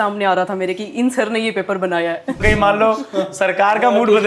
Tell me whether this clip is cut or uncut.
cut